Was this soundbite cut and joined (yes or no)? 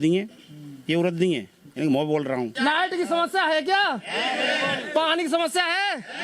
yes